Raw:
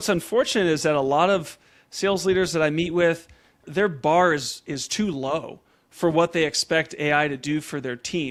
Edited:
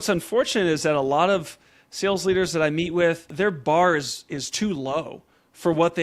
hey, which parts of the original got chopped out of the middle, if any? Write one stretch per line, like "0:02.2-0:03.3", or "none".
0:03.3-0:03.6